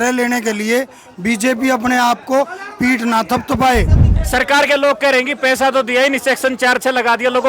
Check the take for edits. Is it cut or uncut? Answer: cut